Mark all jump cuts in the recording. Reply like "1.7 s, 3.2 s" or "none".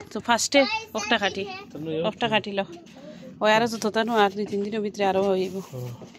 none